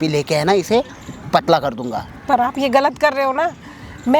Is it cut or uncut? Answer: uncut